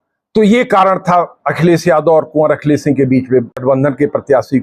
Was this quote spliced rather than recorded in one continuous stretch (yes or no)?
yes